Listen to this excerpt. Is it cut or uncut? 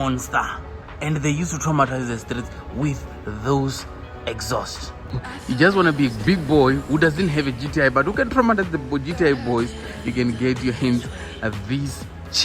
cut